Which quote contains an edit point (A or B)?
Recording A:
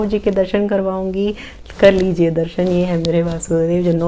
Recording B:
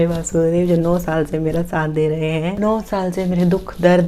B